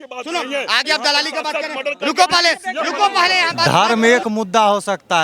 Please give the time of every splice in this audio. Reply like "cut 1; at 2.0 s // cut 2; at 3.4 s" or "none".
cut 1; at 3.6 s